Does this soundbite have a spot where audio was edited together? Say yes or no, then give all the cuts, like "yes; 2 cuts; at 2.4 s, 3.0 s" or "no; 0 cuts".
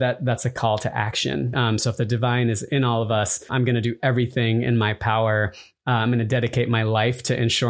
yes; 2 cuts; at 1.5 s, 3.5 s